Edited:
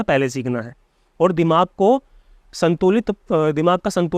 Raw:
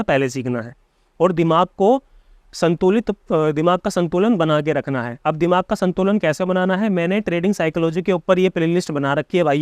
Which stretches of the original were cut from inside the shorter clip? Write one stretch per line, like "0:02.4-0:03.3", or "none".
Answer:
none